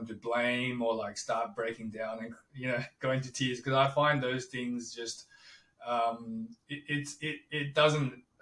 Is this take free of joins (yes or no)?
yes